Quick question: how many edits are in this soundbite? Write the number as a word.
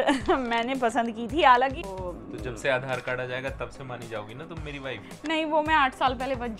one